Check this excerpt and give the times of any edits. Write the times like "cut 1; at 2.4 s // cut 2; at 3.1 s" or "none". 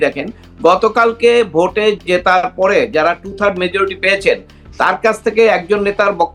none